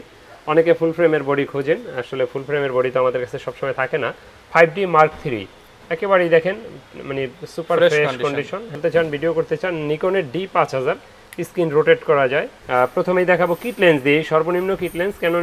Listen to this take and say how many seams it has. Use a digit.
2